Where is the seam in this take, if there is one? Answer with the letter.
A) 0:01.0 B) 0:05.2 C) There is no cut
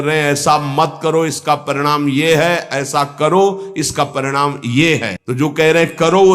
B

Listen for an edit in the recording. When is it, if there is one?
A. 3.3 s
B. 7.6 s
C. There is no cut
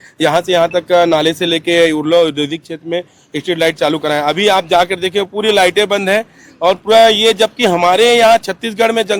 C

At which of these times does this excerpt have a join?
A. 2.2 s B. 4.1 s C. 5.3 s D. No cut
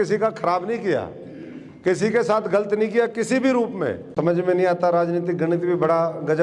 B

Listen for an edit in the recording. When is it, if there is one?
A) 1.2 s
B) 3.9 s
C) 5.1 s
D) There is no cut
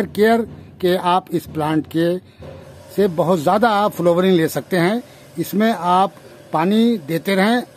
D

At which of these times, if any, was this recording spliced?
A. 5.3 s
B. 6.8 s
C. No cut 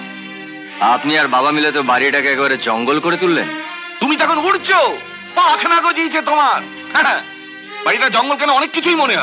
C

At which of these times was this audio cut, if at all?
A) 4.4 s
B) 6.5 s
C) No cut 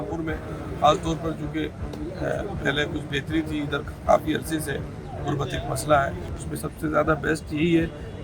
B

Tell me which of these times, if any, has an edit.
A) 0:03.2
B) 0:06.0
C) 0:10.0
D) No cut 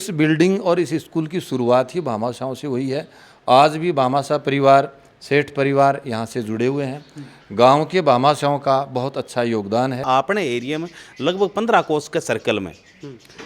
C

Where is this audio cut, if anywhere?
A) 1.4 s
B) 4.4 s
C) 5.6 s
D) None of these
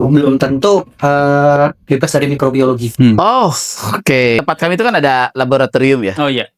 B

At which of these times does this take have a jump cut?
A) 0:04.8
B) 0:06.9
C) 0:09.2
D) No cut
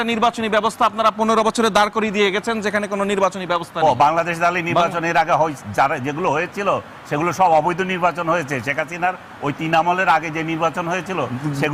D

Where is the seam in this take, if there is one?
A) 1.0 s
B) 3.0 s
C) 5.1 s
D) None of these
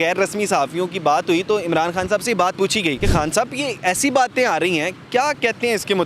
B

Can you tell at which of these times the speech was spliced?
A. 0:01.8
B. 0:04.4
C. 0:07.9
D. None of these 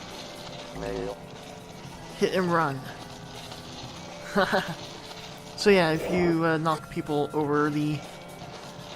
B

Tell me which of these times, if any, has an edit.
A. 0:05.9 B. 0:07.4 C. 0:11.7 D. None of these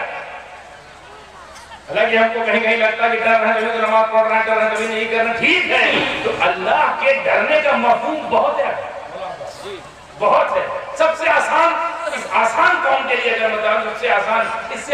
A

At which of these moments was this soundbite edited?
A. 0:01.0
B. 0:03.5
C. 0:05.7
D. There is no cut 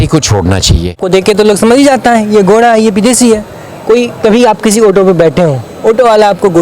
A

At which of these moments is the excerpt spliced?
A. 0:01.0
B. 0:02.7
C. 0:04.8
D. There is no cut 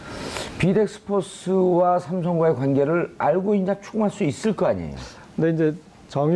D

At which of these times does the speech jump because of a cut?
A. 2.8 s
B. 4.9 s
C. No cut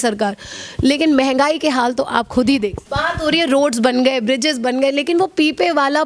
A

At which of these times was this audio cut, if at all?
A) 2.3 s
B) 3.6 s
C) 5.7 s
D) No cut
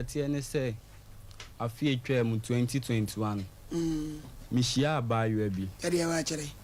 D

